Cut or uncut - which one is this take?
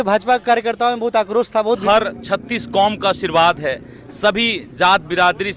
cut